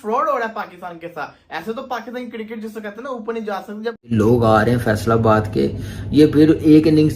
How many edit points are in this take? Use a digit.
1